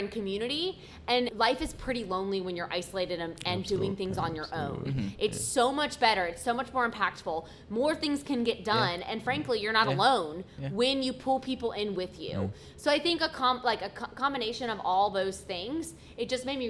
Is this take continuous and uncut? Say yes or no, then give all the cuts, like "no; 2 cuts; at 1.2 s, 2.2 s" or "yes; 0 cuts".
no; 1 cut; at 1.3 s